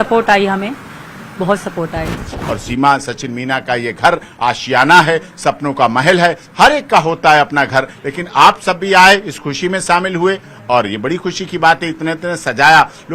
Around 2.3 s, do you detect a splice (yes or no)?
yes